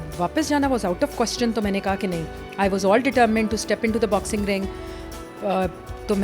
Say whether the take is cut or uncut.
uncut